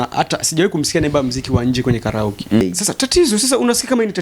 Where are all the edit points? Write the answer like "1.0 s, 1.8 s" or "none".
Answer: 2.6 s